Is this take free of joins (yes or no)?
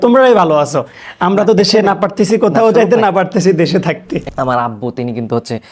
no